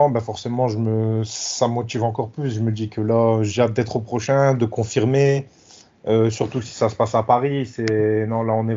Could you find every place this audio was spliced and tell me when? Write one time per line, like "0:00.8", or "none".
none